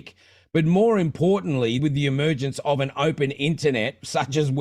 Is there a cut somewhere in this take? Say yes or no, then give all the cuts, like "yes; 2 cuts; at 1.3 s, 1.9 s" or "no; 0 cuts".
yes; 1 cut; at 1.8 s